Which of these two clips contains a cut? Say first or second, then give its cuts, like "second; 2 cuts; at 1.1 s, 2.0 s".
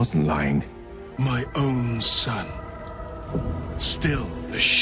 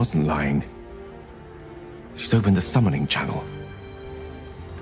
first; 1 cut; at 1.1 s